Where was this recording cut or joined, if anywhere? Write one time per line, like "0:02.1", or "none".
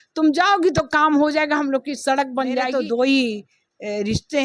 0:02.7